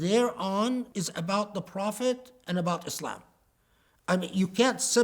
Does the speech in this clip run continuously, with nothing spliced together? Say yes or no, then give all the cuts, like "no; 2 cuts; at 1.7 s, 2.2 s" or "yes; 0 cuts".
no; 1 cut; at 0.9 s